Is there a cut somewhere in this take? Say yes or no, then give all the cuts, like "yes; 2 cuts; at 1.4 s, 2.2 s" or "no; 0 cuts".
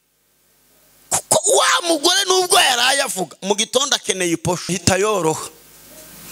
yes; 1 cut; at 4.7 s